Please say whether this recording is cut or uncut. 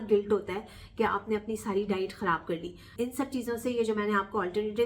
cut